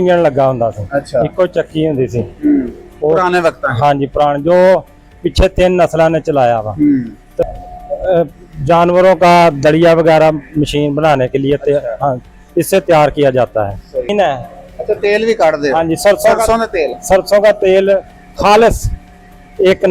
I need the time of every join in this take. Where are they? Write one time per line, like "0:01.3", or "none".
0:07.4
0:14.1